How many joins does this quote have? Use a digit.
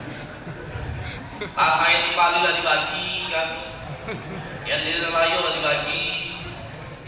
0